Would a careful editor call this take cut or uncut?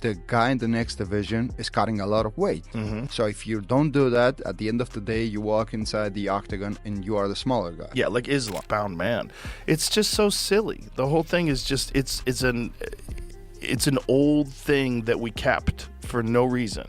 cut